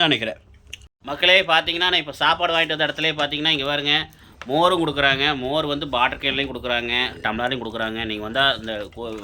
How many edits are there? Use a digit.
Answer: 1